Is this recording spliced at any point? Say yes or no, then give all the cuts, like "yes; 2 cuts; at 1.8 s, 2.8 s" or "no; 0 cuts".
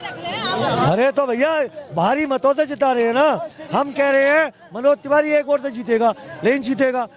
no; 0 cuts